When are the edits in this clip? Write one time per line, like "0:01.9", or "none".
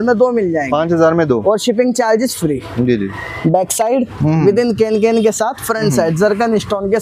0:03.2